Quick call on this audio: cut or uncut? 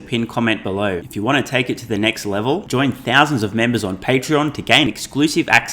cut